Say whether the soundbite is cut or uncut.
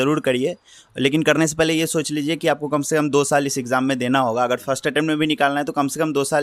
uncut